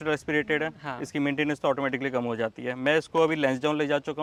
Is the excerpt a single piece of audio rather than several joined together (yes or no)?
yes